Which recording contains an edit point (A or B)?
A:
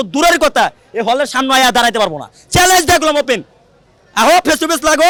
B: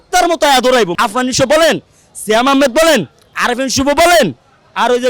B